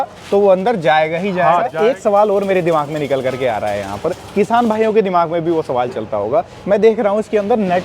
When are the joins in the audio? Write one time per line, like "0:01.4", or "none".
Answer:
0:01.7

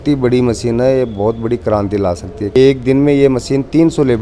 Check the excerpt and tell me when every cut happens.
0:02.6

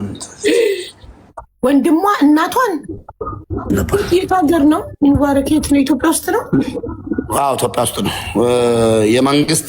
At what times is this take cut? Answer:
0:03.7

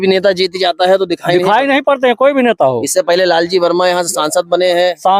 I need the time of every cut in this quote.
none

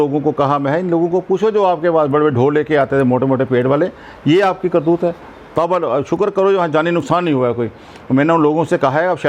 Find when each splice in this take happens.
none

